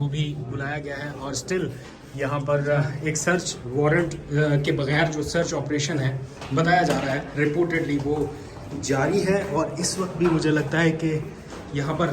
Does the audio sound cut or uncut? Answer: uncut